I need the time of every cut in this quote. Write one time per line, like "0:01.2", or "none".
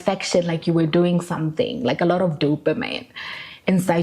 none